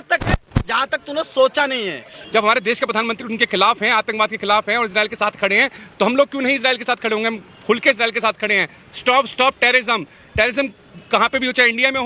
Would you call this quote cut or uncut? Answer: cut